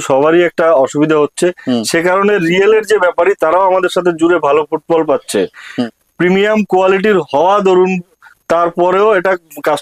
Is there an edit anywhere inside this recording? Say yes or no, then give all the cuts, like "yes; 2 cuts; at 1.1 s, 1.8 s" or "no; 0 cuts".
yes; 1 cut; at 5.7 s